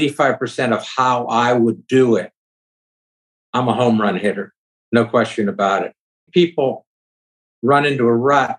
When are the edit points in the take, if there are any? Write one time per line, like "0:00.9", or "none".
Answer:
0:06.3